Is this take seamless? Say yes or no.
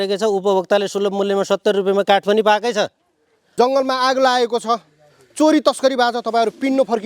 no